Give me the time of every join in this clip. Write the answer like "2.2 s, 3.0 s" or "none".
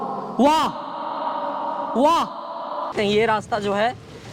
2.9 s